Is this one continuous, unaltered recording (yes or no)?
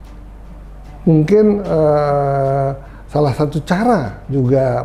yes